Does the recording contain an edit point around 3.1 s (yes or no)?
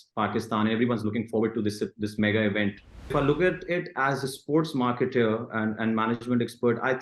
yes